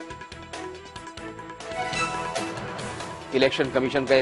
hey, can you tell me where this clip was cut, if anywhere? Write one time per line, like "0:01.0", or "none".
0:01.6
0:03.1

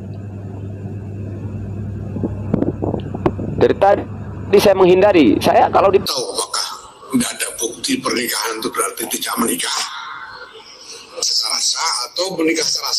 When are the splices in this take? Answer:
0:06.1

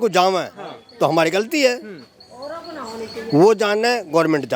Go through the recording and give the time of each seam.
none

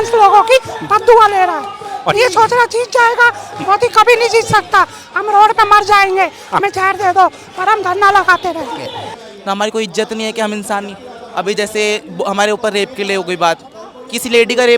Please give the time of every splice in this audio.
0:09.1

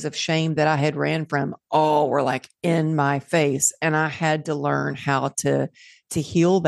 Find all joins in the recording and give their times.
none

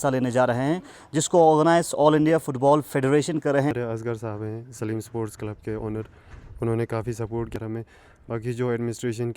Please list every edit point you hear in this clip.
0:03.7
0:07.5

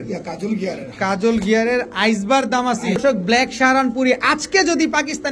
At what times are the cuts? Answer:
0:03.0

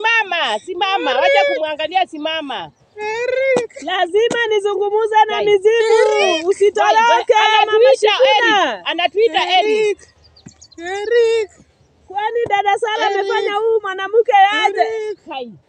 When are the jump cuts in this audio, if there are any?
none

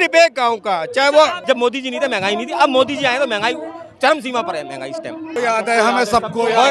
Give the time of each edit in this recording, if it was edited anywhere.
0:01.4
0:05.4

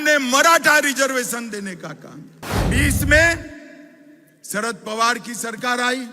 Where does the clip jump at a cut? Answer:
0:02.6

